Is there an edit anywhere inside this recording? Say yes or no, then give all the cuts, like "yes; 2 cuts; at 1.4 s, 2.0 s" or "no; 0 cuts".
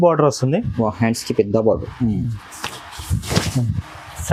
no; 0 cuts